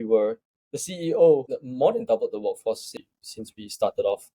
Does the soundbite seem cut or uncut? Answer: cut